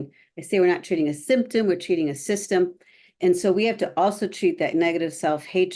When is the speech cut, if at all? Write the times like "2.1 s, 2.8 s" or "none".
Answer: none